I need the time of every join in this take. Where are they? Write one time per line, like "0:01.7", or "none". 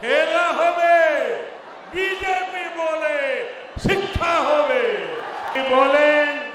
0:05.5